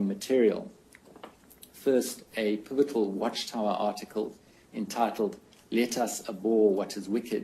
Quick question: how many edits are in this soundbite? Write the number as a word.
one